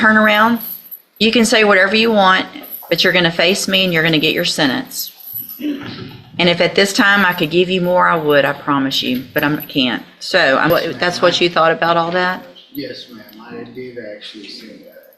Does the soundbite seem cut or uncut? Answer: cut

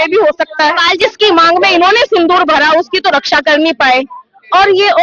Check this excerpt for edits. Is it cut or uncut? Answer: cut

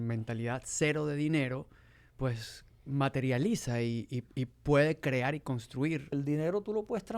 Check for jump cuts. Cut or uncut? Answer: cut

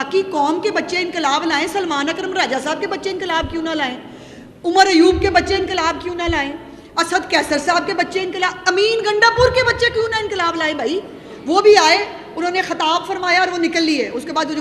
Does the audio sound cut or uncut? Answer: uncut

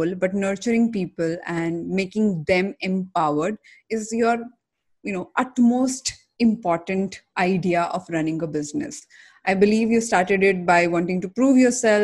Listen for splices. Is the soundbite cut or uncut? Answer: uncut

